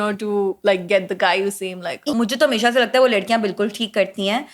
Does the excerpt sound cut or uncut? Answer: cut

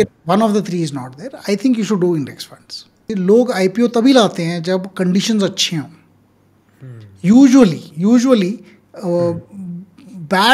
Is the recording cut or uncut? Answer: cut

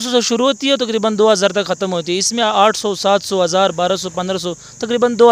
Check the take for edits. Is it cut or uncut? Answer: uncut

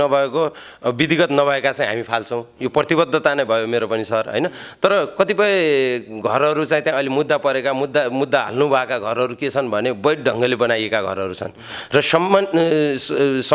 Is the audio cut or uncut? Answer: uncut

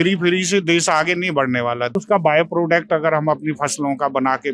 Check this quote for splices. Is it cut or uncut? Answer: cut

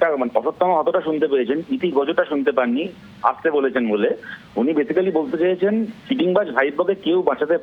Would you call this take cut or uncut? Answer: uncut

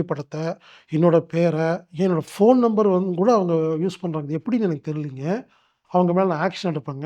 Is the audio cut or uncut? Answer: cut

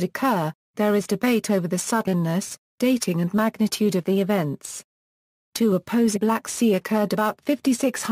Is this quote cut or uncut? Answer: uncut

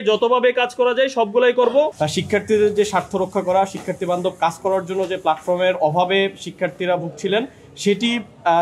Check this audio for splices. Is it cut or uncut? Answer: cut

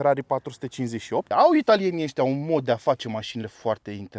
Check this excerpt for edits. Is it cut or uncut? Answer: cut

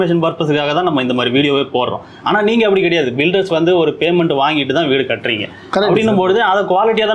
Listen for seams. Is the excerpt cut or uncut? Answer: uncut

